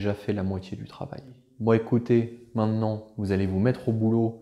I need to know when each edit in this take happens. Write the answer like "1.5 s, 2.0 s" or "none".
1.5 s